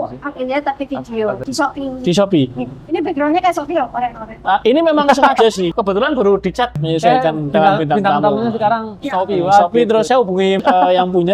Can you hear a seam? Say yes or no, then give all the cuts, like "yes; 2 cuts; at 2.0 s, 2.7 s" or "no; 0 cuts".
yes; 5 cuts; at 1.4 s, 5.7 s, 6.8 s, 8.9 s, 10.3 s